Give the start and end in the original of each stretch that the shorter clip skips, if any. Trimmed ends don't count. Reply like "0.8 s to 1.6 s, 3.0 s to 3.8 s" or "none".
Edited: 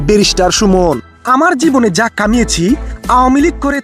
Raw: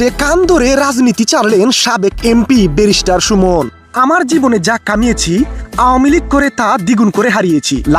none